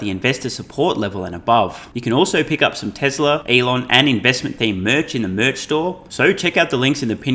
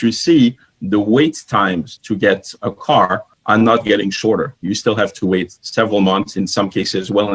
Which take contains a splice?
first; 3 cuts; at 1.9 s, 3.4 s, 6.0 s

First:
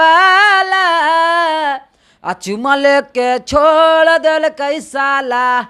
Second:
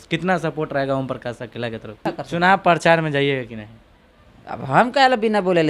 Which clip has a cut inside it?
second; 1 cut; at 2.0 s

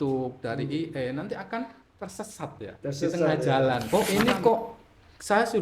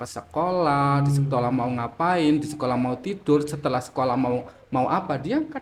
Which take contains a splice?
first; 1 cut; at 3.8 s

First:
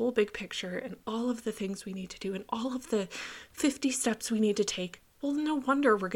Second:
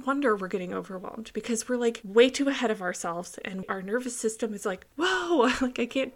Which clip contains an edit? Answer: second; 2 cuts; at 2.0 s, 3.7 s

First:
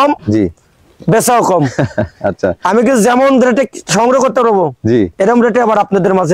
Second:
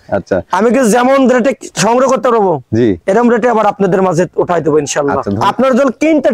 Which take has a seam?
second; 1 cut; at 5.3 s

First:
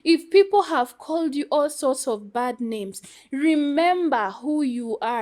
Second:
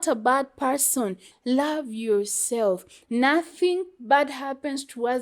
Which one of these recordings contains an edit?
second; 1 cut; at 1.3 s

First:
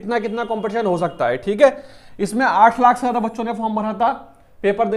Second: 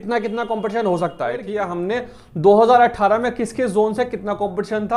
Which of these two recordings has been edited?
second; 1 cut; at 1.5 s

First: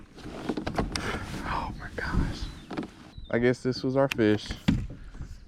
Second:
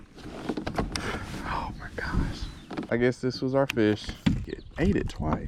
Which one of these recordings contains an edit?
second; 2 cuts; at 2.9 s, 4.6 s

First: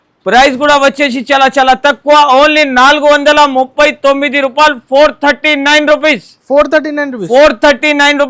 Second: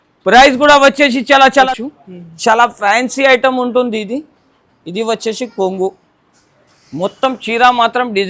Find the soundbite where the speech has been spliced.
second; 1 cut; at 1.7 s

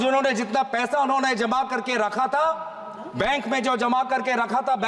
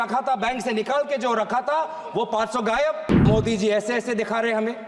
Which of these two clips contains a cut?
second; 1 cut; at 3.2 s

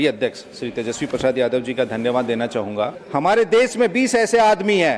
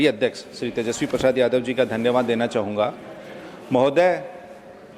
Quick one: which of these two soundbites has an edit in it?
first; 1 cut; at 3.0 s

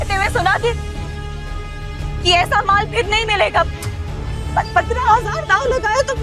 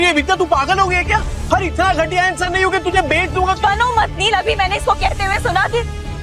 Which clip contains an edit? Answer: second; 1 cut; at 1.3 s

